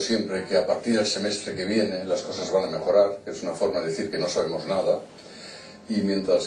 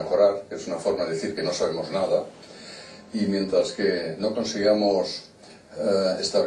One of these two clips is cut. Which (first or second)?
second